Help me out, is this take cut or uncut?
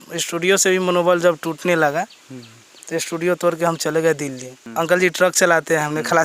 cut